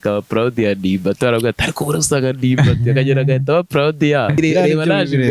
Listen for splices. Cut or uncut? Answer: cut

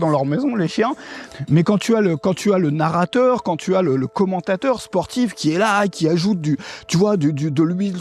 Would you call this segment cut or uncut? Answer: uncut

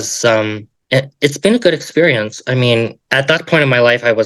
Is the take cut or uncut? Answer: cut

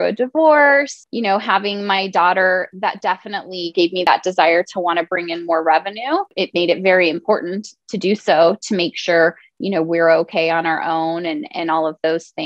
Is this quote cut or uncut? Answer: cut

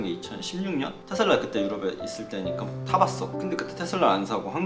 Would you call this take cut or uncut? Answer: cut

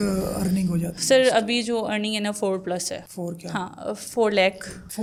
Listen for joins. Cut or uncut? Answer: uncut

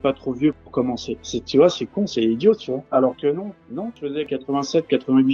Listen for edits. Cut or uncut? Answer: cut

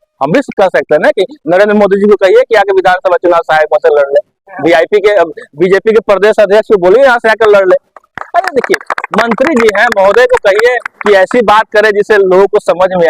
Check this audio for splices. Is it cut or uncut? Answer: uncut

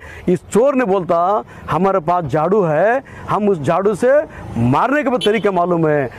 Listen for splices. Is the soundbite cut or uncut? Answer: uncut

